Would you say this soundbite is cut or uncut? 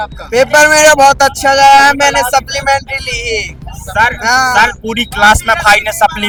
uncut